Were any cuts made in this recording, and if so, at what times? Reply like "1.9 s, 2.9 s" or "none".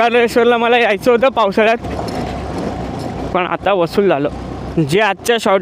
4.6 s